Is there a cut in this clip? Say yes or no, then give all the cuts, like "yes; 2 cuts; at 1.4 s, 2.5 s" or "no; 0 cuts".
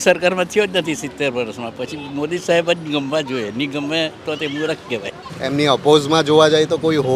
yes; 1 cut; at 5.2 s